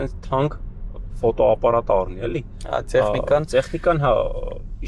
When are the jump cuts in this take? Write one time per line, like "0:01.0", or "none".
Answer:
none